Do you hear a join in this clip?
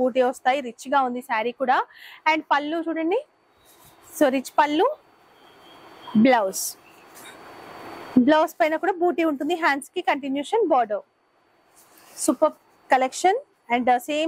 no; 0 cuts

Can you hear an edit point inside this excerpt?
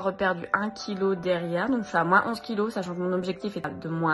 no; 0 cuts

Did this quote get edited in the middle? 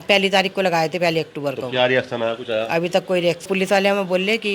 yes; 1 cut; at 3.5 s

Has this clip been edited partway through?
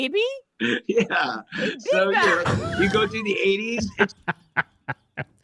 no; 0 cuts

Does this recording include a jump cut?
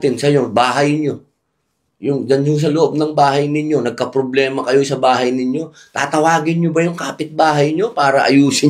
no; 0 cuts

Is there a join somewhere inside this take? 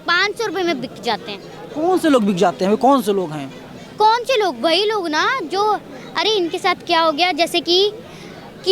no; 0 cuts

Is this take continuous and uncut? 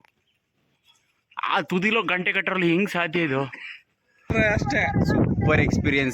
no; 1 cut; at 4.3 s

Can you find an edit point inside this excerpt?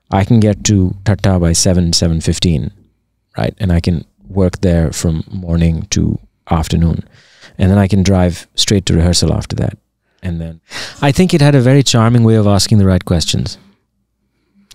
yes; 1 cut; at 10.5 s

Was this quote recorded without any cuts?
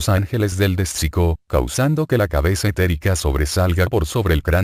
yes; 0 cuts

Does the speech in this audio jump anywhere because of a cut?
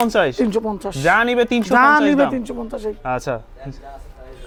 no; 0 cuts

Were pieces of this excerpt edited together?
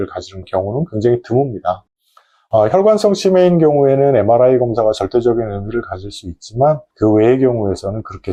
no; 0 cuts

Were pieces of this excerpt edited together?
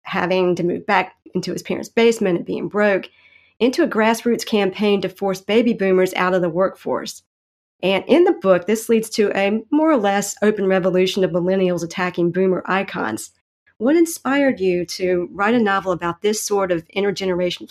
yes; 1 cut; at 13.6 s

